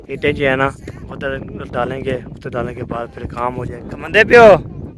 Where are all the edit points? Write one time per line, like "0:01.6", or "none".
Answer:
0:03.8